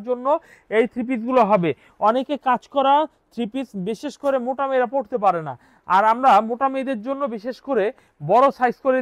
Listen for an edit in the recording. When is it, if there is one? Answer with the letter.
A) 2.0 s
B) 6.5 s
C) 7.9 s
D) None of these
D